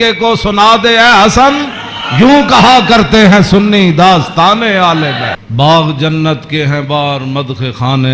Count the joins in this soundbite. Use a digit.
1